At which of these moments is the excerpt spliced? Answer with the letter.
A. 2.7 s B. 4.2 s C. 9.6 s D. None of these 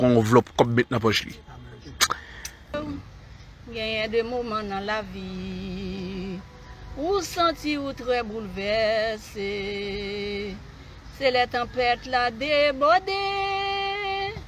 A